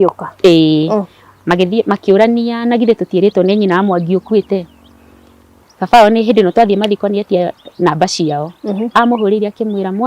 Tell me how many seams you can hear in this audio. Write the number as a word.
one